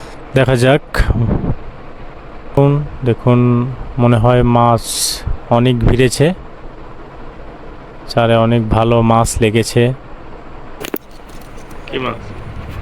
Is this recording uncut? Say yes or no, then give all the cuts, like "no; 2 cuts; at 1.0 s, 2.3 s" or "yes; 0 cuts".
no; 1 cut; at 2.6 s